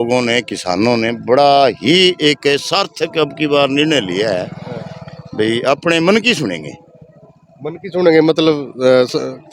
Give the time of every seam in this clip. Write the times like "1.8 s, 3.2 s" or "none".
none

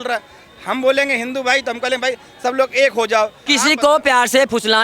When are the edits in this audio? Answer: 3.4 s

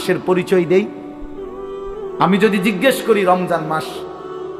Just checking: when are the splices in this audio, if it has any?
none

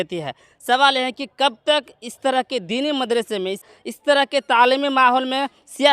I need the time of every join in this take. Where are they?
3.6 s

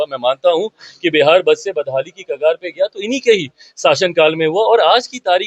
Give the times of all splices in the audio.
none

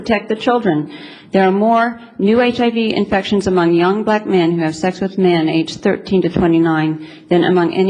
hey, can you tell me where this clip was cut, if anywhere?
none

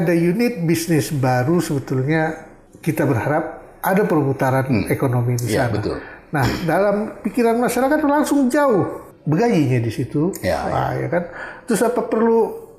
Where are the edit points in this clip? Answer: 9.1 s

